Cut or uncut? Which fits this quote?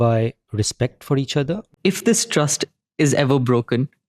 cut